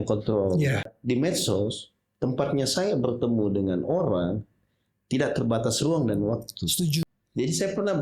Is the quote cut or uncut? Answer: cut